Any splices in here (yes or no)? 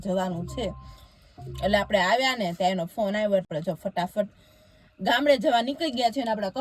yes